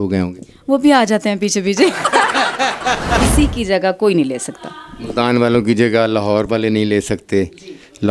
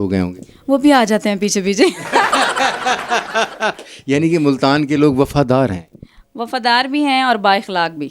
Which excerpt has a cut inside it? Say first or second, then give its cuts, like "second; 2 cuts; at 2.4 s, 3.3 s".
first; 1 cut; at 3.2 s